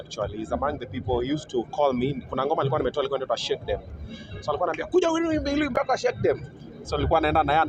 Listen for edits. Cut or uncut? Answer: uncut